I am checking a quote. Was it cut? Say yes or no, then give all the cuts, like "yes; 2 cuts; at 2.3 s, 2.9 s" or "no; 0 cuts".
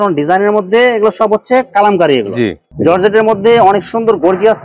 yes; 1 cut; at 2.6 s